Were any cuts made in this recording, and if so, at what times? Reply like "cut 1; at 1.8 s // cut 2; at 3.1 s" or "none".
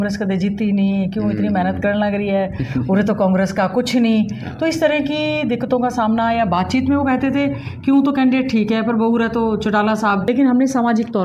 cut 1; at 10.3 s